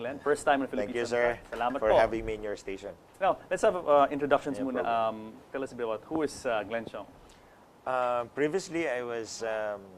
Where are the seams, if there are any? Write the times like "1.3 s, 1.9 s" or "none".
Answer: 7.5 s

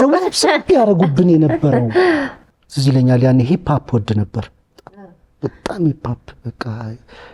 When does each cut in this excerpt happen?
2.4 s

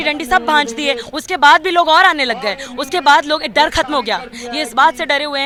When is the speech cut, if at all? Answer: none

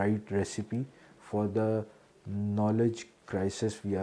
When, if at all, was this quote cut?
none

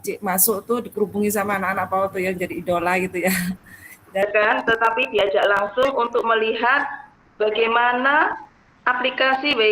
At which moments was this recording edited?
4.2 s

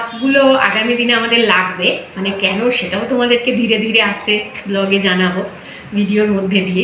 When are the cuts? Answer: none

